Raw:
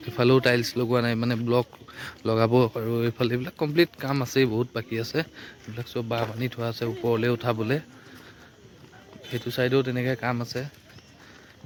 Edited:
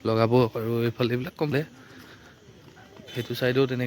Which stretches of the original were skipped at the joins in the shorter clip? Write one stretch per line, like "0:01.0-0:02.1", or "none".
0:03.7-0:07.7